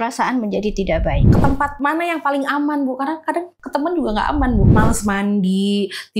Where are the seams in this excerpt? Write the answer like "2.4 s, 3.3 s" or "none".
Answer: 1.3 s, 4.7 s